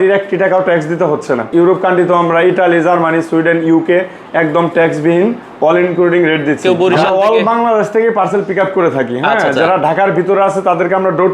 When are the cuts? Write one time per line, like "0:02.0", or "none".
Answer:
0:01.4
0:06.6